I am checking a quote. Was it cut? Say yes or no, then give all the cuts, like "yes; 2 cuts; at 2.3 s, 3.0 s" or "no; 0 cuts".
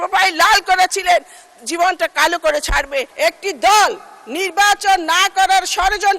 yes; 1 cut; at 3.1 s